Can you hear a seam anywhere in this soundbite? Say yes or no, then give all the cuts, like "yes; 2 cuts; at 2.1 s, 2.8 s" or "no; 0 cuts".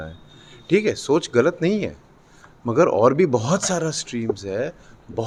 no; 0 cuts